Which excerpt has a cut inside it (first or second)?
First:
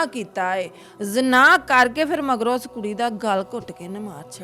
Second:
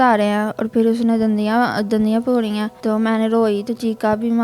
second